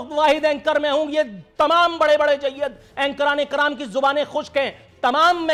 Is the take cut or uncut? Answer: uncut